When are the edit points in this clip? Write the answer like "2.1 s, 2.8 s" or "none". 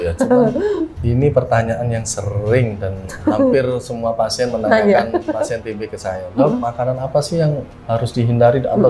0.9 s

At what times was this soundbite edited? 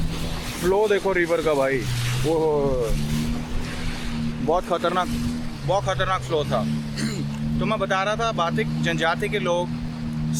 none

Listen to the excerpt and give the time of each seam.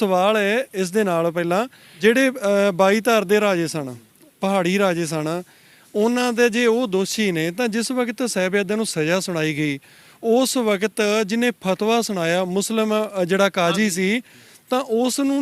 1.8 s

